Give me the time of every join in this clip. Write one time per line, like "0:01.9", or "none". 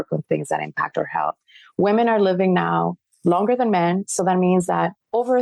none